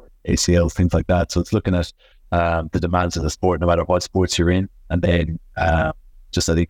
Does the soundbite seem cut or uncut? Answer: uncut